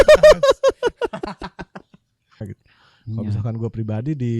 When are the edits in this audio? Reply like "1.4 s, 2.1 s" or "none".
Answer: 2.4 s